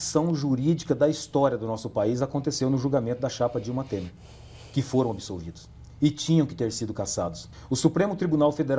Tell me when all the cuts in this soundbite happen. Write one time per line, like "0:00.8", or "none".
0:07.4